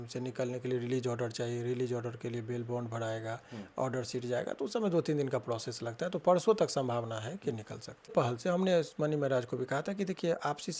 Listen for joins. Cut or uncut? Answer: cut